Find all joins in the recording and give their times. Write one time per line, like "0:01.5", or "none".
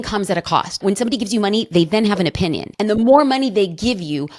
0:00.8
0:02.7